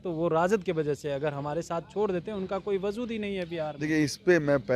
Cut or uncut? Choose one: uncut